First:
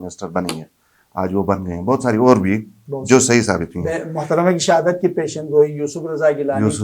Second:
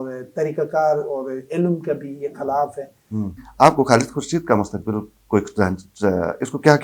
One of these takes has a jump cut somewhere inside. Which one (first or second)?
second